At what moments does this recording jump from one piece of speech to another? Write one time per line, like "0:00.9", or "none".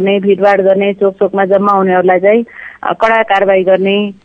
none